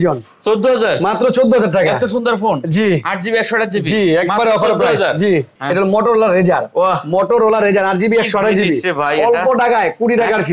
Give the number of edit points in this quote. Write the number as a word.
one